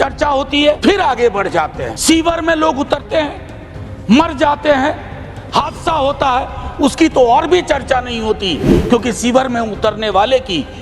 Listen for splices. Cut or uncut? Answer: cut